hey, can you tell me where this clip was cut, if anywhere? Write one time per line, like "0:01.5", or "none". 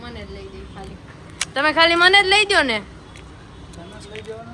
none

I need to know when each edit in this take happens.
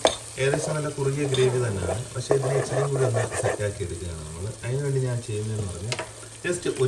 none

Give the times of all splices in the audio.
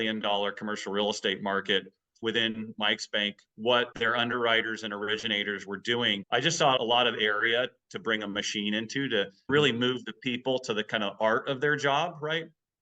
0:02.2
0:03.9
0:06.2

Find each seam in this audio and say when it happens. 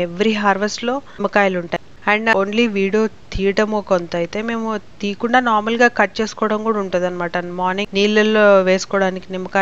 none

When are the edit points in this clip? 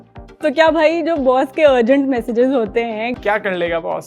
0:03.1

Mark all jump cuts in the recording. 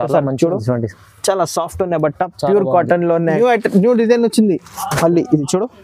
0:03.4

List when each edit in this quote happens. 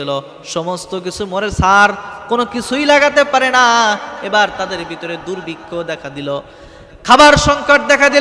none

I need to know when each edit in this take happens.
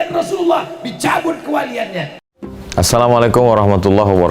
0:02.2

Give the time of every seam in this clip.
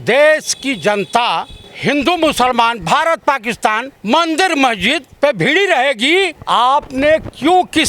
0:01.6
0:03.9
0:05.1
0:06.4

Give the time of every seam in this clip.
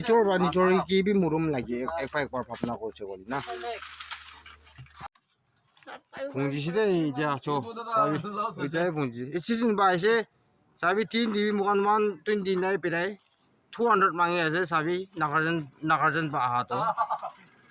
0:05.2

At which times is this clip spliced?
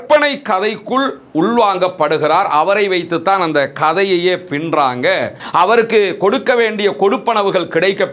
0:05.4

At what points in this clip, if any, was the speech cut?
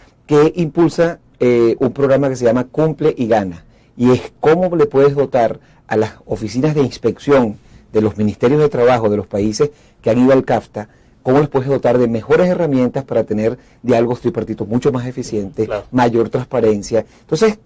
0:10.7

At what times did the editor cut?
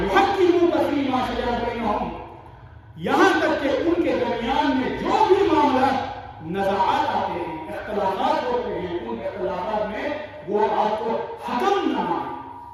none

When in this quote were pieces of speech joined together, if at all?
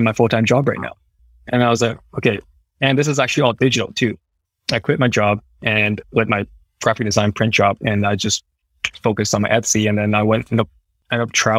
none

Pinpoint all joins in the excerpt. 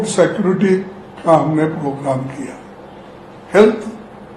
none

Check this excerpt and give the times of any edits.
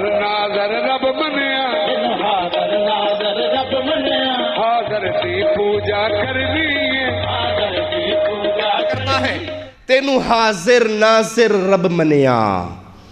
0:09.7

